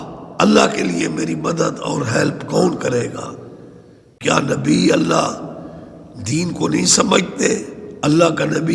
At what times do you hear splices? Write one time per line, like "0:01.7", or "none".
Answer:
0:04.2